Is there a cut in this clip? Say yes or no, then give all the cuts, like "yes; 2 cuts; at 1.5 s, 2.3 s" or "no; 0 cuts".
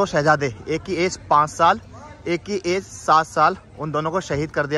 no; 0 cuts